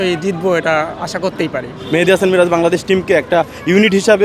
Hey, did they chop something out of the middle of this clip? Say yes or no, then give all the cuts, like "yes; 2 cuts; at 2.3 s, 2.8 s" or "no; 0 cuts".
yes; 1 cut; at 1.8 s